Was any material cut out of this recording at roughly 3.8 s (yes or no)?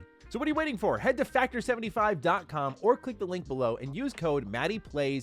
yes